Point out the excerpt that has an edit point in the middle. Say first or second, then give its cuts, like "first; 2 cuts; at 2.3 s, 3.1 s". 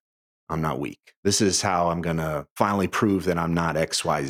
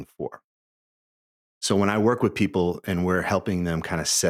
first; 1 cut; at 2.5 s